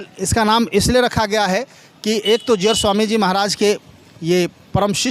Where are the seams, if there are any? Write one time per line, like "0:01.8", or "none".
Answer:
none